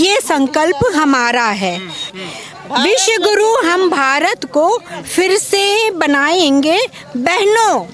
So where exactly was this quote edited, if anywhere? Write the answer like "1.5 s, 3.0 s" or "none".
2.1 s